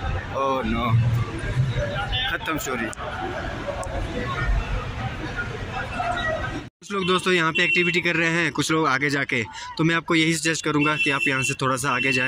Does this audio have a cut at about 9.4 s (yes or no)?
no